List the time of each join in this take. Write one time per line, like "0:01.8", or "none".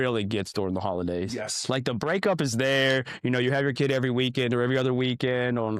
none